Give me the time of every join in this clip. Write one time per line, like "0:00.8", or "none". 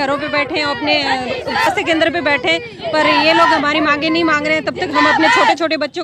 0:01.7